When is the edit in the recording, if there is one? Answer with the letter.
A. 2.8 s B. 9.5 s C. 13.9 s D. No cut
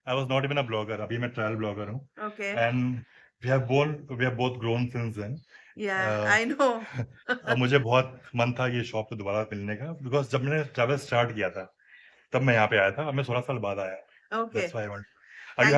D